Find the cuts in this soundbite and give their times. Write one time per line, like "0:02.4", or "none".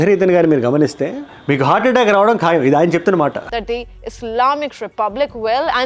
none